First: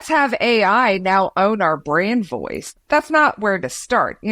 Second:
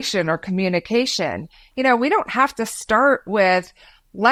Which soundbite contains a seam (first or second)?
first